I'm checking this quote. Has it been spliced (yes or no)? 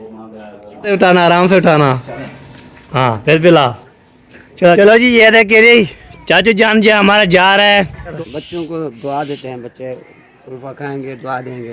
yes